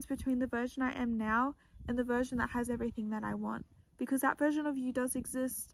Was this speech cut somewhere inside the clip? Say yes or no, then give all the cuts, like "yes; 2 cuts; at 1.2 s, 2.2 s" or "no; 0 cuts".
no; 0 cuts